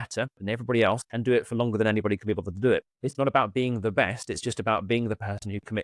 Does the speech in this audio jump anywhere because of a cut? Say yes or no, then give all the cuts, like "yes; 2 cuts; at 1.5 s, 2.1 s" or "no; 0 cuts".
yes; 2 cuts; at 1.1 s, 3.1 s